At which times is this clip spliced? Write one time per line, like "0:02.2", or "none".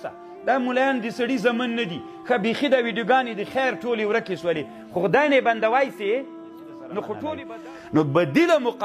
0:07.5